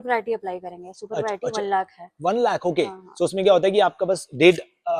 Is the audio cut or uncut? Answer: uncut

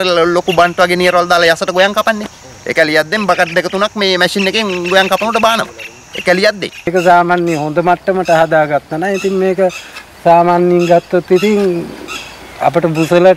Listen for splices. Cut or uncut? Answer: cut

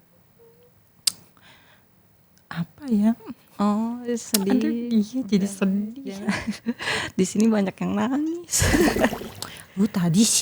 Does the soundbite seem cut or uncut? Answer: cut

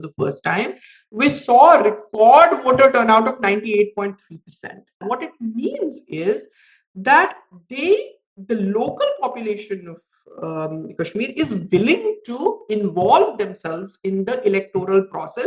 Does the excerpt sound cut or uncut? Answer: cut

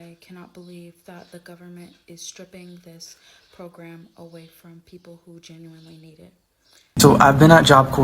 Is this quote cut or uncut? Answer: cut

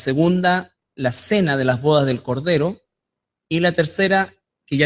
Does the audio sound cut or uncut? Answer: cut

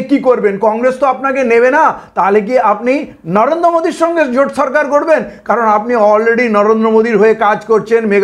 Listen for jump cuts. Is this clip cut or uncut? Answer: uncut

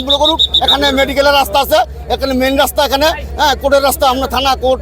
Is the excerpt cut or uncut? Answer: uncut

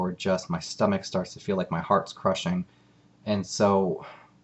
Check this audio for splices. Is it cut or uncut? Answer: cut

